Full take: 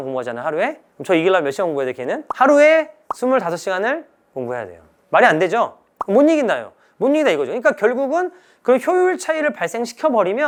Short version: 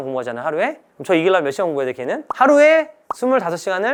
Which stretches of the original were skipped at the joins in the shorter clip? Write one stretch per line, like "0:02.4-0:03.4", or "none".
none